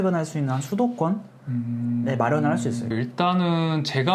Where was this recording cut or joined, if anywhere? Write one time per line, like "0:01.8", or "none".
0:02.9